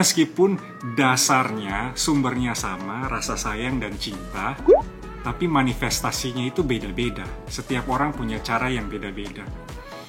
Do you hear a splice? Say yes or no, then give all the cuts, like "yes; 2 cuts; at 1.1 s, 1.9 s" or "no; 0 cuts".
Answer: no; 0 cuts